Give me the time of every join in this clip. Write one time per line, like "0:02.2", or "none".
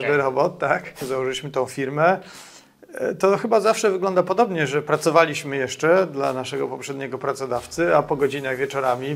0:01.0